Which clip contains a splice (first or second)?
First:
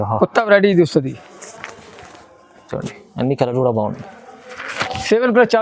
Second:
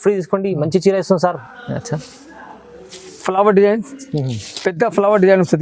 second